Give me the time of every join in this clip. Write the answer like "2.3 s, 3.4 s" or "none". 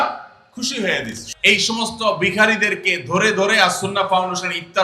1.2 s